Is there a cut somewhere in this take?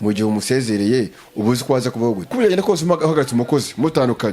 yes; 1 cut; at 2.3 s

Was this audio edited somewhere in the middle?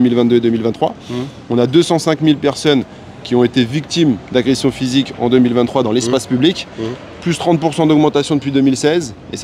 no; 0 cuts

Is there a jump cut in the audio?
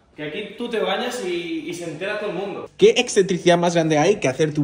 yes; 1 cut; at 2.6 s

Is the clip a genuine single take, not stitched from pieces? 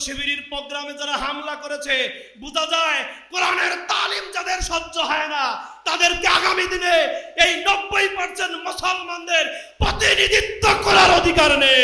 yes; 0 cuts

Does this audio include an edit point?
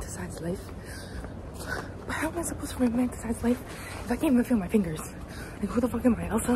no; 0 cuts

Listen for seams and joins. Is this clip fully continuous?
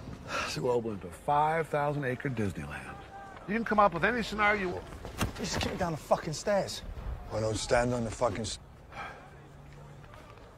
yes; 0 cuts

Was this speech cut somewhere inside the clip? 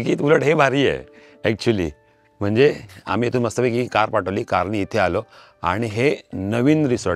no; 0 cuts

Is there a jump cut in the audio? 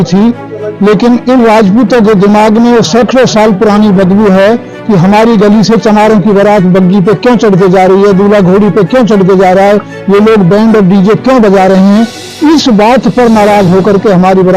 no; 0 cuts

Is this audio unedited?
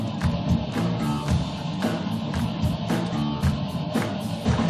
no; 1 cut; at 1.2 s

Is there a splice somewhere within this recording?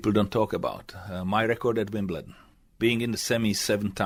no; 0 cuts

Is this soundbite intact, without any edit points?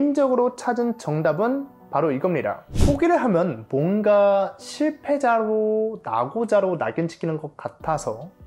no; 1 cut; at 2.7 s

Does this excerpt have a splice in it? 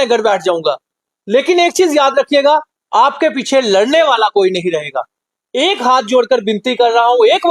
no; 0 cuts

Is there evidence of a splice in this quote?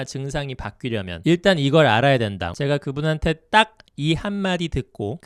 yes; 1 cut; at 2.4 s

